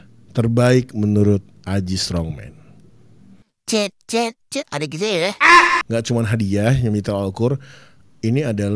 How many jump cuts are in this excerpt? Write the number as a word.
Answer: one